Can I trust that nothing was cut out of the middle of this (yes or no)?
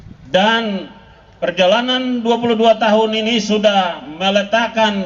yes